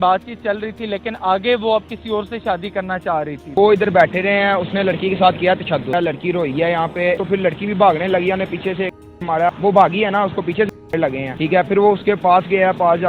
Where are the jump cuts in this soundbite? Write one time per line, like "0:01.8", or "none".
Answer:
0:03.5
0:05.9
0:07.2
0:09.5
0:11.3